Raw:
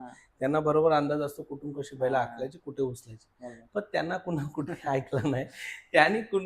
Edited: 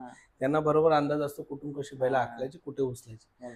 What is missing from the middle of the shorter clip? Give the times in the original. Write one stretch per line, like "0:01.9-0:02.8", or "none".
none